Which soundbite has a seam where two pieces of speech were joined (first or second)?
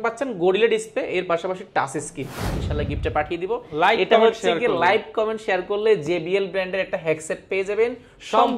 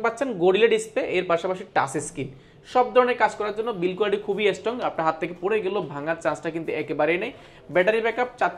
first